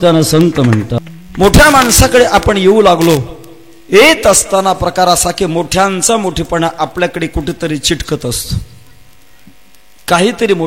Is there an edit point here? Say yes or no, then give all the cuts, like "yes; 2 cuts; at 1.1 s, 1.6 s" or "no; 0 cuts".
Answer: yes; 1 cut; at 1.0 s